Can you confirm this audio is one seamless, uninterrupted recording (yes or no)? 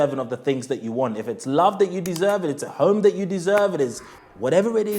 yes